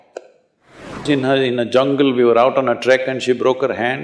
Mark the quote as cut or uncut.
cut